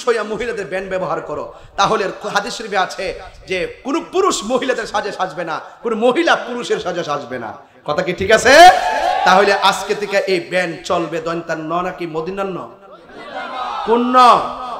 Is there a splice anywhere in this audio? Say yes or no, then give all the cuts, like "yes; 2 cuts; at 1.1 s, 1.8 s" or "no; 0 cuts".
no; 0 cuts